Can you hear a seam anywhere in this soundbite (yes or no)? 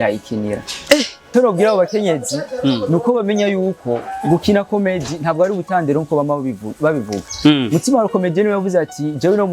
yes